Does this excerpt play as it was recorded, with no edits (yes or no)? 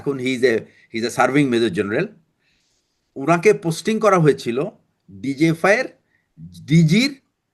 yes